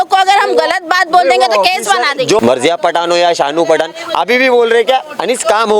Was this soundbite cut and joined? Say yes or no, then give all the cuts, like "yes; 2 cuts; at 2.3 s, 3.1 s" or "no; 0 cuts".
yes; 1 cut; at 2.4 s